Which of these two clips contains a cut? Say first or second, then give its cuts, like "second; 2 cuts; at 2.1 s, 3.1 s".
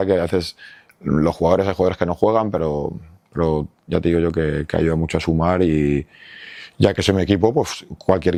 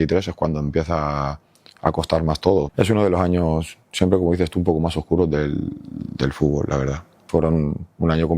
second; 2 cuts; at 2.7 s, 7.2 s